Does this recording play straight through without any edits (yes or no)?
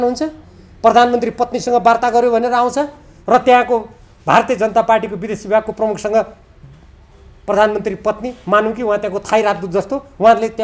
yes